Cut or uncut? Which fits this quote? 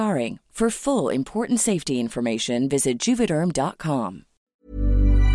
cut